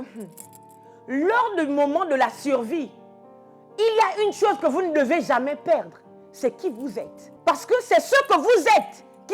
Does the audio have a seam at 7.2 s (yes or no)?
yes